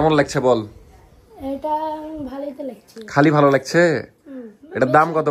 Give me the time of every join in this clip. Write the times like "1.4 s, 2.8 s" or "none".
none